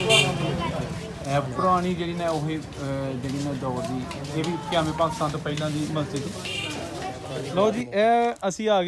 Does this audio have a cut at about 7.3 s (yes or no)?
yes